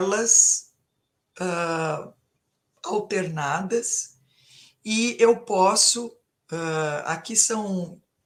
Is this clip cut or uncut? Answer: uncut